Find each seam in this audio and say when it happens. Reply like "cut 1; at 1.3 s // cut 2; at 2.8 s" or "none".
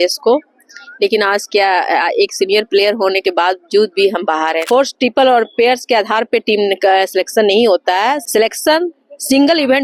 cut 1; at 4.7 s